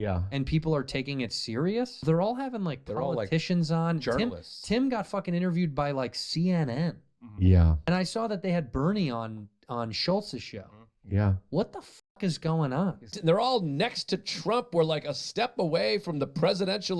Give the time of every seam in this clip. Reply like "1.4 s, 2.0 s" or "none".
13.2 s